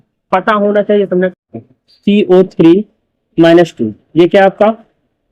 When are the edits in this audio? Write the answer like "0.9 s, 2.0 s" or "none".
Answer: 1.4 s